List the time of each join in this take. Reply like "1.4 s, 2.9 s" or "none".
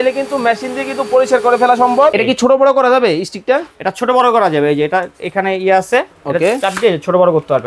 2.1 s

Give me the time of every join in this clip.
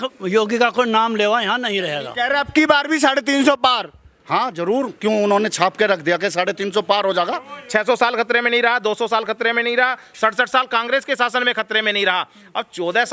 2.0 s, 7.5 s

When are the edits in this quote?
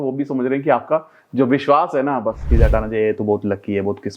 2.5 s

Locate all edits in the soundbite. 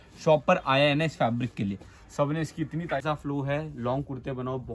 3.0 s

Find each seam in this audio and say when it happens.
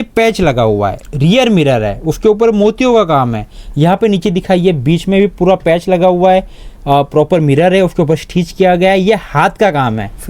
none

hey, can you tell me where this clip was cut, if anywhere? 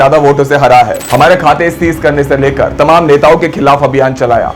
1.0 s

